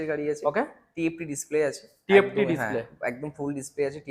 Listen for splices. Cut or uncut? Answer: uncut